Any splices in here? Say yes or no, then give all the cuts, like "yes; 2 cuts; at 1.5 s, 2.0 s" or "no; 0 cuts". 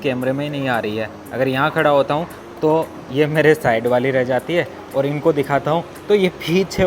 no; 0 cuts